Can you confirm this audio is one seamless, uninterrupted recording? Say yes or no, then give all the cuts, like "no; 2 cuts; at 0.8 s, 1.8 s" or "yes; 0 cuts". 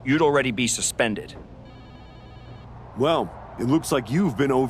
no; 2 cuts; at 1.3 s, 2.9 s